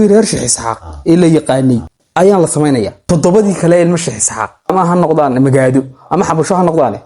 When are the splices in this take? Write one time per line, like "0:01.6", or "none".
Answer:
0:02.0
0:03.0
0:04.7